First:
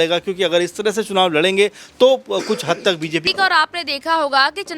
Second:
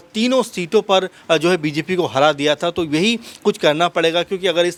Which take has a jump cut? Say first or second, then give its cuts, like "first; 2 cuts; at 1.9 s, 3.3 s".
first; 1 cut; at 3.3 s